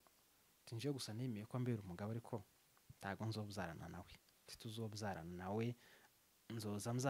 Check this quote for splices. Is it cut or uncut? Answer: uncut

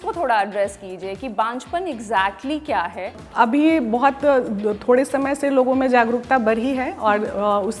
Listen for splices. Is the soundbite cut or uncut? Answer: cut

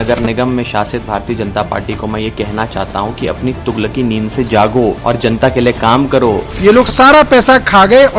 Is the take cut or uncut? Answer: cut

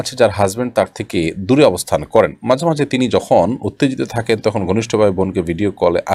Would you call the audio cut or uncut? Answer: uncut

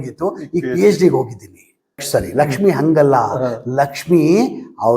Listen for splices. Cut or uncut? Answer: cut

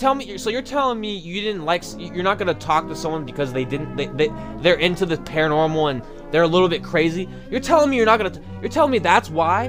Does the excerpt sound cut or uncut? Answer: uncut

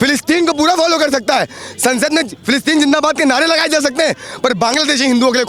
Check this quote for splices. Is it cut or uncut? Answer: uncut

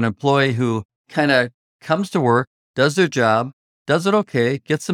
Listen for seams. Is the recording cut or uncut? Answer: cut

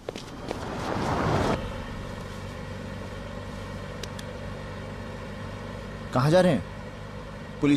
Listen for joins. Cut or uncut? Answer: cut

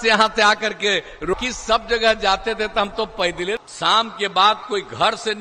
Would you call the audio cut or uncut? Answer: cut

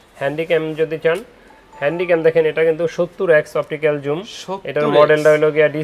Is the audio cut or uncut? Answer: uncut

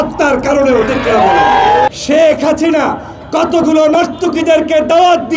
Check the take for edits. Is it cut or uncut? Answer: cut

